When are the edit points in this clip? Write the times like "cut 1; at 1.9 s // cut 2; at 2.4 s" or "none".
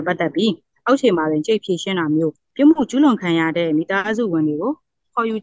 cut 1; at 2.4 s